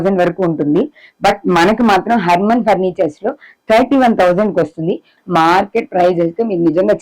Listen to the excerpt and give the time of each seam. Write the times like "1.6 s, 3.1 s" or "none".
5.1 s